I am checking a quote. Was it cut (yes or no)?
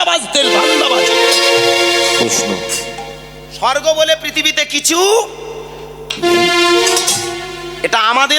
no